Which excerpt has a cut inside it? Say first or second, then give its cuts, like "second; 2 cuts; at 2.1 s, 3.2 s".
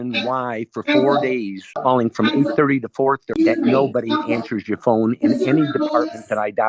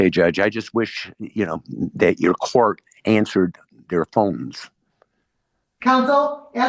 first; 2 cuts; at 1.7 s, 3.4 s